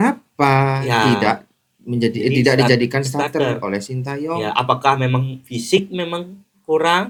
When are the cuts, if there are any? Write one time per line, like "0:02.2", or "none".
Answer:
none